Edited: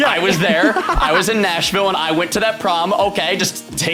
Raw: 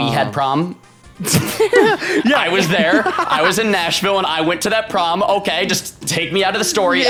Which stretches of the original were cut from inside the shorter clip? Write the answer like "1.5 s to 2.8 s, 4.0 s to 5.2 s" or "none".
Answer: none